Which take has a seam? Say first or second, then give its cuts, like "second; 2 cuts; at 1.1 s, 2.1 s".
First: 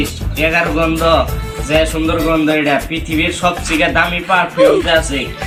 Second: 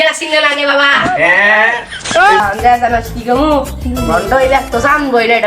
second; 1 cut; at 2.4 s